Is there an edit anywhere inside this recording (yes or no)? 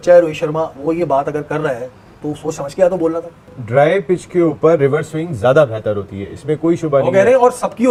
no